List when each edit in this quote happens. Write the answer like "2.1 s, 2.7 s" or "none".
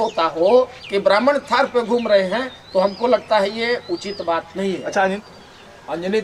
5.2 s